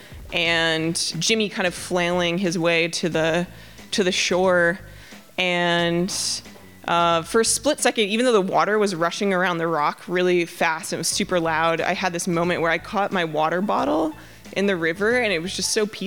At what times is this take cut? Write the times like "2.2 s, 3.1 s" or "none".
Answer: 1.2 s